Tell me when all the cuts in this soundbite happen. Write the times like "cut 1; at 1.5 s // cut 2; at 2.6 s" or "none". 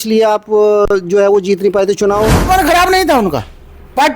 cut 1; at 2.5 s

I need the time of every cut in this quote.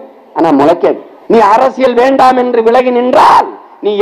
cut 1; at 1.1 s

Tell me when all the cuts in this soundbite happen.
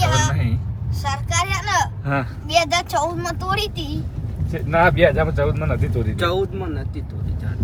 none

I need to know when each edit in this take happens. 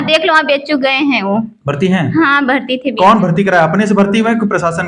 none

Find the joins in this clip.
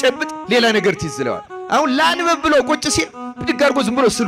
none

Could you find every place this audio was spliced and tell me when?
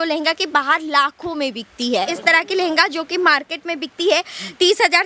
cut 1; at 2.1 s

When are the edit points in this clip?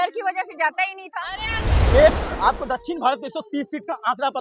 cut 1; at 1.7 s

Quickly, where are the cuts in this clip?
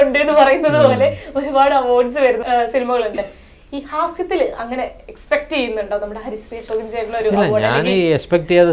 cut 1; at 2.4 s

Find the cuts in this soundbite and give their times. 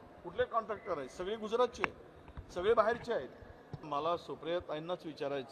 cut 1; at 3.9 s

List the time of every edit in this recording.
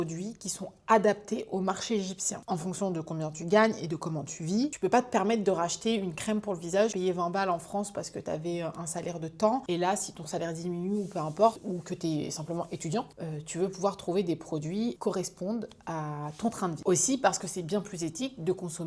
none

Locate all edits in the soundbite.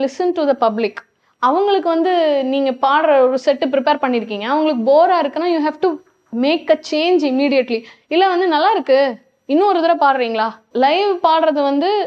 cut 1; at 10.6 s

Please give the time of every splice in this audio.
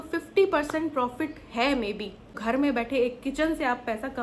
cut 1; at 2.3 s

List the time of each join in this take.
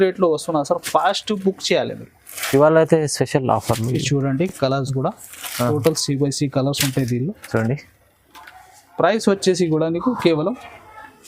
none

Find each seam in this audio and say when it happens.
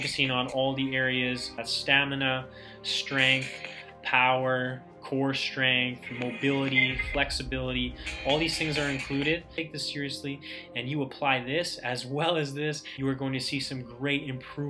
cut 1; at 1.7 s // cut 2; at 9.5 s // cut 3; at 12.9 s

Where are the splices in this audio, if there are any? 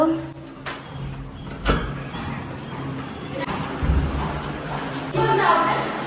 cut 1; at 3.4 s // cut 2; at 5.1 s

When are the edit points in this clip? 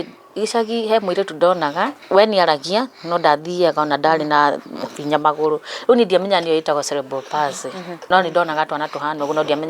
cut 1; at 2.0 s // cut 2; at 8.1 s

